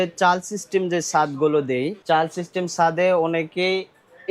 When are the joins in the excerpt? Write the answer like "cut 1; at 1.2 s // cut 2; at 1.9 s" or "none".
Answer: cut 1; at 2.0 s